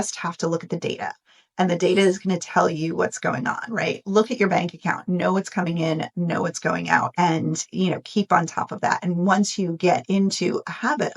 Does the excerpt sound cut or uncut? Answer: uncut